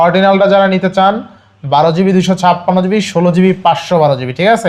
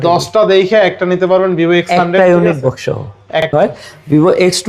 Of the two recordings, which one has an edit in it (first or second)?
second